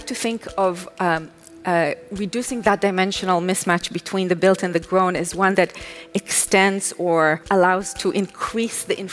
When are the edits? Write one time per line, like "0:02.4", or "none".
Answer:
0:07.5